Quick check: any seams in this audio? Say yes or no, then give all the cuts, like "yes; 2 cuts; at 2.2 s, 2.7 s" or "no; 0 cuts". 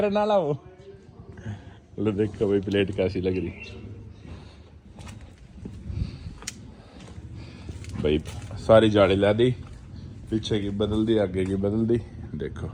no; 0 cuts